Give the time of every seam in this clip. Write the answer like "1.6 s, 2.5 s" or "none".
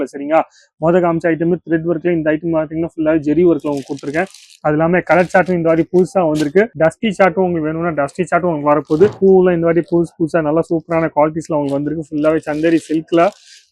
9.2 s